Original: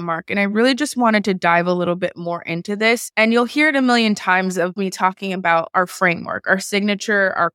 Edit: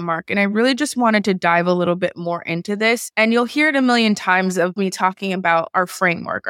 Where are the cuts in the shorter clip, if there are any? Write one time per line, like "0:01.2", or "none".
none